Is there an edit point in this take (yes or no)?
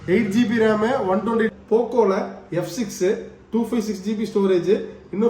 yes